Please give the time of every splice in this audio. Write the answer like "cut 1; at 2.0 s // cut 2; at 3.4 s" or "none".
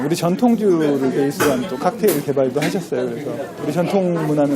cut 1; at 3.5 s